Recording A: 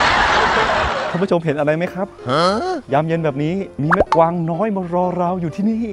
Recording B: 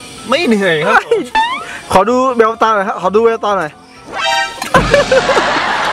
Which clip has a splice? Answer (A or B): A